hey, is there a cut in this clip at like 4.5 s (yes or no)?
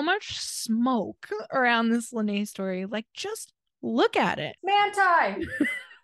yes